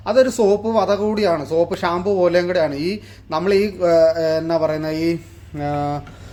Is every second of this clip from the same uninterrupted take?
yes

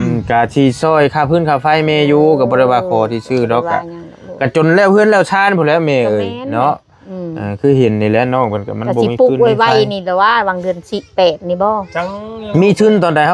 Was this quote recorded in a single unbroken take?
yes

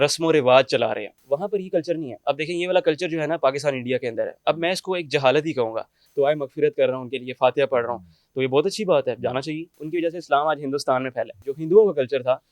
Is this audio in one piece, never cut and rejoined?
no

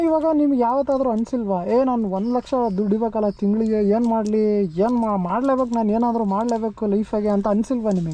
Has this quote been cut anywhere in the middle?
no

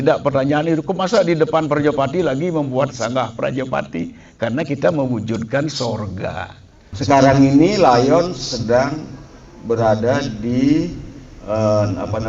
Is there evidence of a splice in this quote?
yes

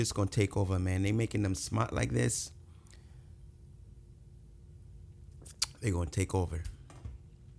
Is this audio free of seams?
yes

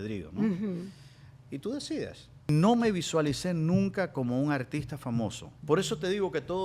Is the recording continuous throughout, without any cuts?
no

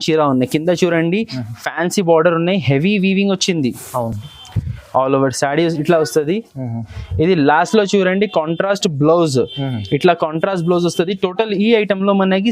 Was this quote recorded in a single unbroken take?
yes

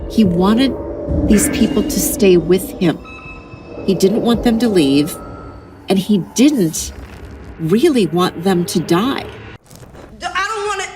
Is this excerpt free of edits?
no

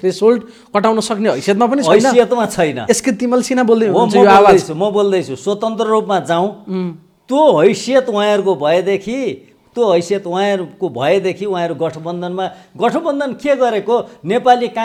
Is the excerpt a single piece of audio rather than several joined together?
yes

